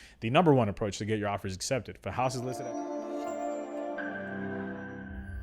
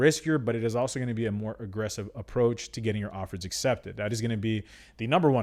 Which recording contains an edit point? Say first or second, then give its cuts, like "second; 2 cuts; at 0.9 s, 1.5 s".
first; 1 cut; at 2.5 s